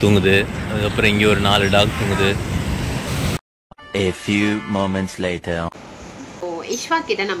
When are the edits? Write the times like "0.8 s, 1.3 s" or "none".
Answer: 3.1 s, 6.4 s

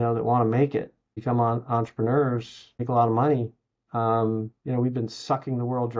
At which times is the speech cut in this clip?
none

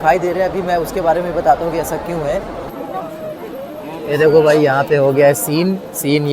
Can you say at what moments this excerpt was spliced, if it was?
3.1 s

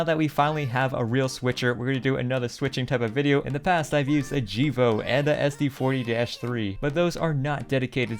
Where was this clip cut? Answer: none

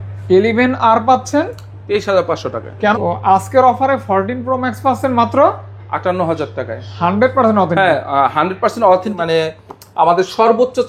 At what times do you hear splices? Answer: 2.9 s, 9.2 s

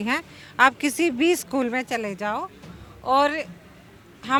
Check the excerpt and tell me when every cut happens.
none

